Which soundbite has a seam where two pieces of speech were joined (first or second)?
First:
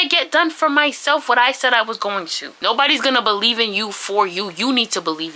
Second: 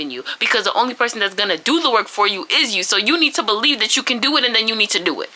first